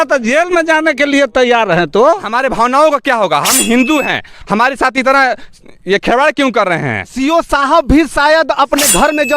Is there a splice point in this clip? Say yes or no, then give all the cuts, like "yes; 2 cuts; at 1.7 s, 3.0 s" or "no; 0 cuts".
yes; 2 cuts; at 2.3 s, 7.0 s